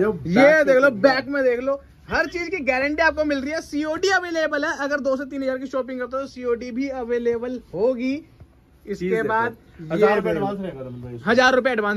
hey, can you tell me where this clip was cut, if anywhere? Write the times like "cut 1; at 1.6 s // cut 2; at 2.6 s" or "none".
none

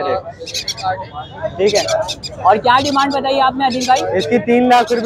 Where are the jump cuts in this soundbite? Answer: none

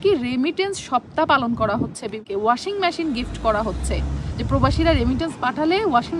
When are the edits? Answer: cut 1; at 2.2 s

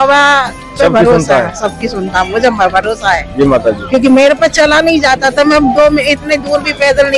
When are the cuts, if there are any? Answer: none

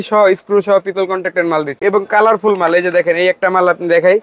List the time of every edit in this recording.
cut 1; at 1.8 s

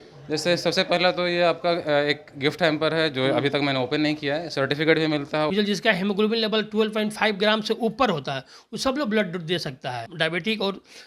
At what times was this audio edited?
cut 1; at 5.5 s // cut 2; at 10.0 s

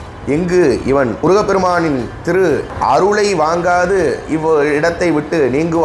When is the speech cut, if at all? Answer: cut 1; at 1.2 s // cut 2; at 2.7 s

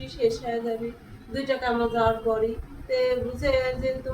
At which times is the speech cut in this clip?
cut 1; at 2.7 s

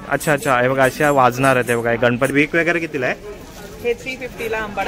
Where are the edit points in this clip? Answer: cut 1; at 2.3 s

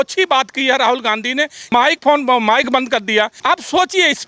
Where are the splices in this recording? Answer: cut 1; at 1.6 s // cut 2; at 3.3 s

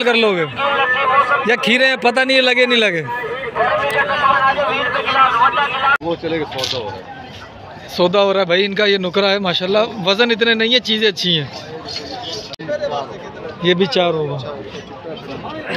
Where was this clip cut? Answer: cut 1; at 6.0 s // cut 2; at 12.6 s

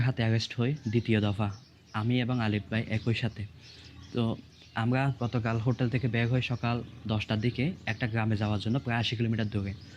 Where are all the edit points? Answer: none

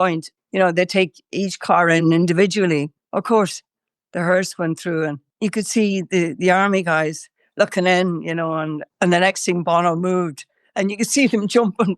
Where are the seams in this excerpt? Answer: cut 1; at 3.0 s // cut 2; at 5.2 s

